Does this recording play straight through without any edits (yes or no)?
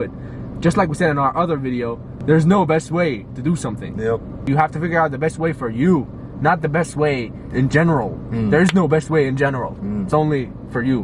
no